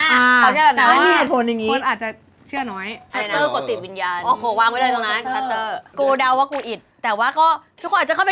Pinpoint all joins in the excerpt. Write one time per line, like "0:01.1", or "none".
0:03.1
0:05.9